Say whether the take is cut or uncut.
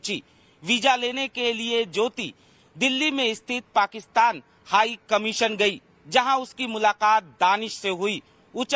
cut